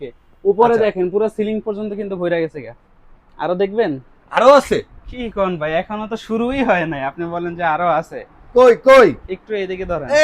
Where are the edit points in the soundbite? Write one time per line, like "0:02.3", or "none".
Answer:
none